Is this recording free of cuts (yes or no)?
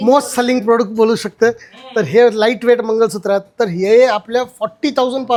yes